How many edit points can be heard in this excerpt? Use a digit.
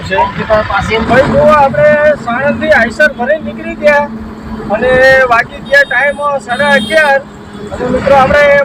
1